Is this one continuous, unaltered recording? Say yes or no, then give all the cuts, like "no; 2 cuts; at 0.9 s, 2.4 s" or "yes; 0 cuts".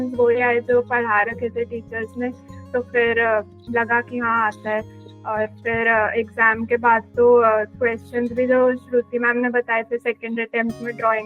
yes; 0 cuts